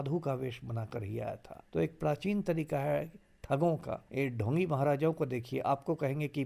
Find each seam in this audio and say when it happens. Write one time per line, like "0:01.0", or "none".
0:01.5
0:04.0